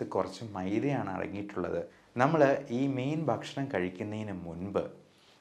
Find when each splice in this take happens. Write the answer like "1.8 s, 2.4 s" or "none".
1.9 s